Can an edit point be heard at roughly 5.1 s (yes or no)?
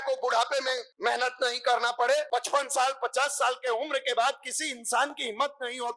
no